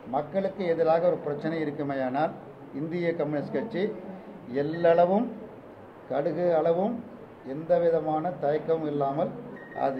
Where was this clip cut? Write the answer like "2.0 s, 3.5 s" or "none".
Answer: none